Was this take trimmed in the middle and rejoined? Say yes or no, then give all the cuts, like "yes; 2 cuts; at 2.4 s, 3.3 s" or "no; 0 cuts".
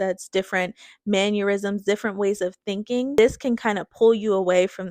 yes; 1 cut; at 3.2 s